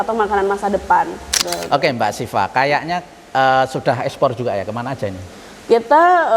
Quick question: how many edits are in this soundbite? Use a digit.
1